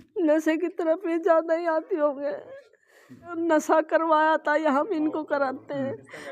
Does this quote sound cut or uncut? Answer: cut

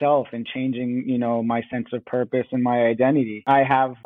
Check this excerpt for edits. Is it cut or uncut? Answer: uncut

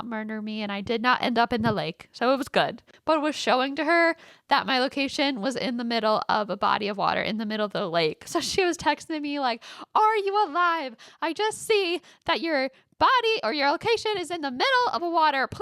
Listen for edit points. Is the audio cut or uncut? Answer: cut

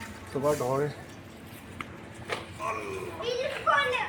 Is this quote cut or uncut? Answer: uncut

